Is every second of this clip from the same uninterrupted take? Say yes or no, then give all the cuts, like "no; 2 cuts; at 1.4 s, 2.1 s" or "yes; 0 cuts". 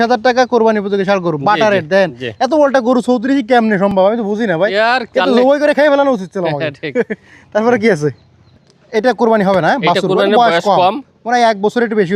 yes; 0 cuts